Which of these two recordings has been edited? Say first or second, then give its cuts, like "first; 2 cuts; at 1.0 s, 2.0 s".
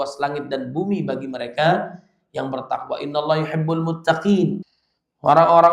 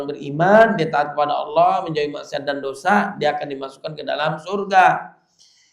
first; 1 cut; at 4.6 s